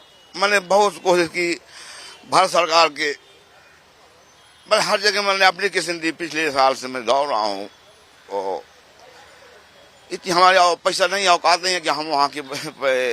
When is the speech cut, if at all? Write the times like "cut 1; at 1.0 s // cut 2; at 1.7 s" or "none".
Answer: none